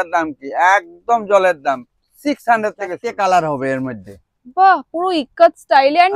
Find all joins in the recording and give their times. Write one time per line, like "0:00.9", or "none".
0:03.0